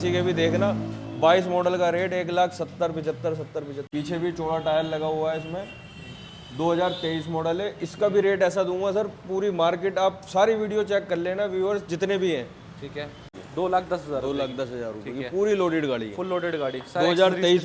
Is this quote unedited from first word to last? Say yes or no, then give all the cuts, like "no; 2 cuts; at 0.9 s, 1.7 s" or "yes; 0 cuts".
no; 2 cuts; at 3.8 s, 13.2 s